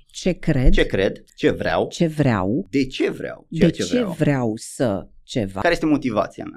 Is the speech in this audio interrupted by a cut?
yes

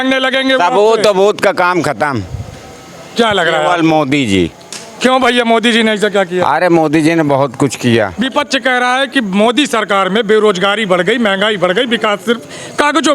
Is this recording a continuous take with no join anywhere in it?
no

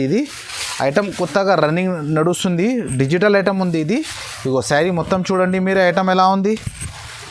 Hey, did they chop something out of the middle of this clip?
no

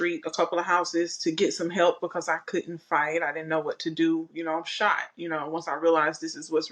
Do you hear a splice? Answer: no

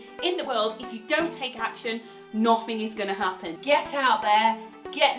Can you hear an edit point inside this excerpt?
yes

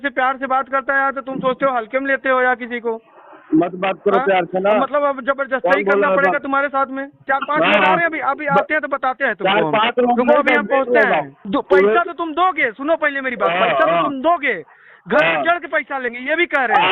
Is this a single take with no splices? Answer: no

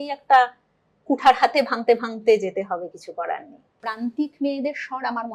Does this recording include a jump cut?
yes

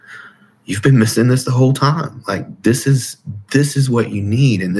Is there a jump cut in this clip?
no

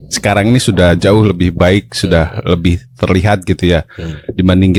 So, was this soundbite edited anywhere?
no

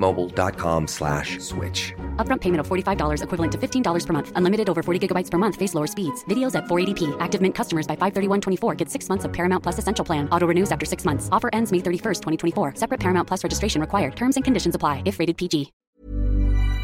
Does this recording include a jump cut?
yes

